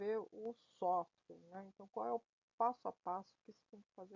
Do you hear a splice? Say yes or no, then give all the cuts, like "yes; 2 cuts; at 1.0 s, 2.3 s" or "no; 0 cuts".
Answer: no; 0 cuts